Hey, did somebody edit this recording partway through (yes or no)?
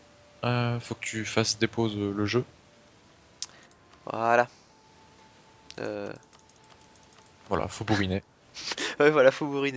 no